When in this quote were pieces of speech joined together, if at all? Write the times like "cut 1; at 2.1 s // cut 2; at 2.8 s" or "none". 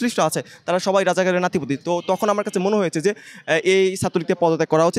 none